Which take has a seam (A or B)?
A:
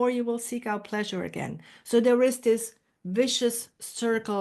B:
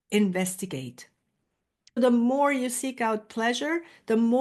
B